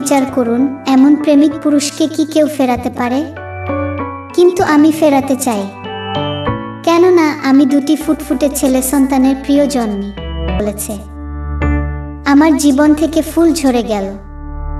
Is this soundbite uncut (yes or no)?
no